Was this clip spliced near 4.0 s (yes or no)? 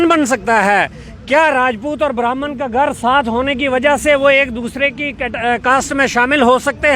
no